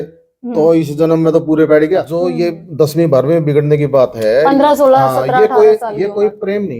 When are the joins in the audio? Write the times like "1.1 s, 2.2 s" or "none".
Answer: 2.3 s